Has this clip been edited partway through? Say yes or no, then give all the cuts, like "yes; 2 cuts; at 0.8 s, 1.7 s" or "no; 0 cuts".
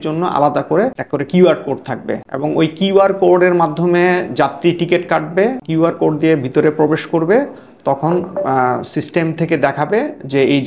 yes; 3 cuts; at 1.0 s, 2.2 s, 5.6 s